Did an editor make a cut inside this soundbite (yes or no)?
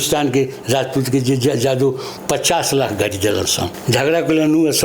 yes